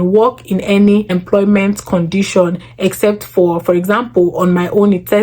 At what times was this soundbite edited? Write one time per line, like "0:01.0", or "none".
0:01.1